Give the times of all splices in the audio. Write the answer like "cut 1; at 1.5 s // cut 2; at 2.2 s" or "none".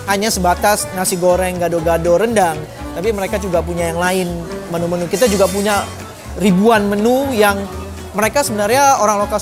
none